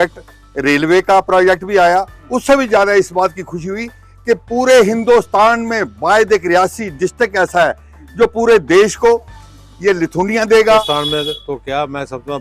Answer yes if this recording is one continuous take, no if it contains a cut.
no